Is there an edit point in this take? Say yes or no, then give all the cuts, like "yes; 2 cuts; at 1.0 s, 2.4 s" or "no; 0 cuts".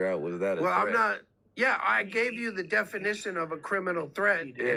no; 0 cuts